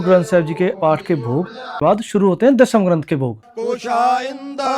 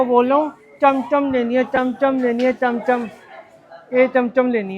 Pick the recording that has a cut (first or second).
first